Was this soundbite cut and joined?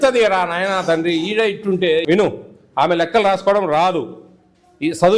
yes; 1 cut; at 2.0 s

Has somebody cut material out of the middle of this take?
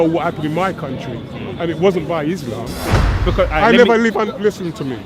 yes; 1 cut; at 3.1 s

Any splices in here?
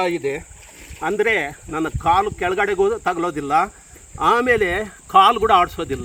no; 0 cuts

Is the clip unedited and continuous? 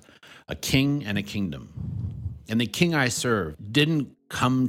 no; 1 cut; at 3.6 s

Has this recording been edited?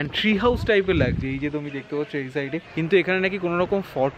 yes; 1 cut; at 2.7 s

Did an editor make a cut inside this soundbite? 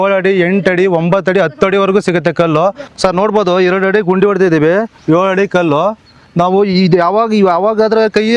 no; 0 cuts

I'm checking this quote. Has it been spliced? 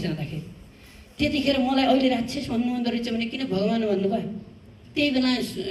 no; 0 cuts

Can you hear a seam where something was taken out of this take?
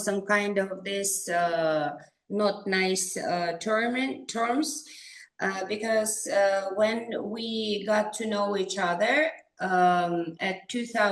no; 0 cuts

